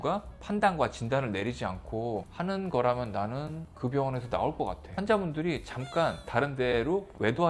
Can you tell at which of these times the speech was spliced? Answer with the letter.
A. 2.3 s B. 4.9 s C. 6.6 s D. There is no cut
B